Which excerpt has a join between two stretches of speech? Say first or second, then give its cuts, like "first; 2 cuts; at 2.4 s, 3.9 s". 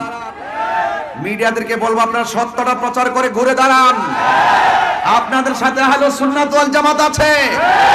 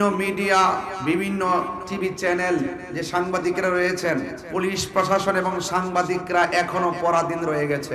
second; 3 cuts; at 0.9 s, 1.8 s, 4.4 s